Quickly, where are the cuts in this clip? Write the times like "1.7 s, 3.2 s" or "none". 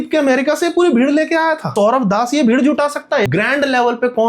1.7 s, 3.2 s